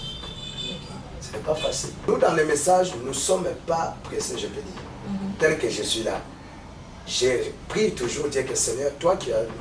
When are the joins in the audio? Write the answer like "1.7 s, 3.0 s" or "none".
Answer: 2.1 s